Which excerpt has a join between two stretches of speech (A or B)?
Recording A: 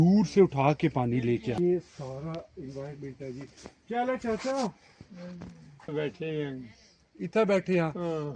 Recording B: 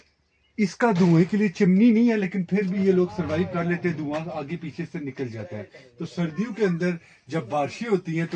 A